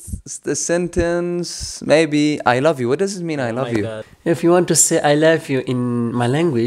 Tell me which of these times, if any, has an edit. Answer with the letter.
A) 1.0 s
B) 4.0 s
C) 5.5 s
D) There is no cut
B